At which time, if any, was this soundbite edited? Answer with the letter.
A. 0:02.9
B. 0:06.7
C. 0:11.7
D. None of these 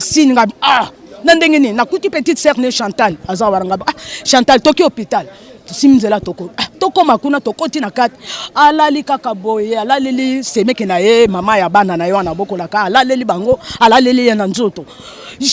D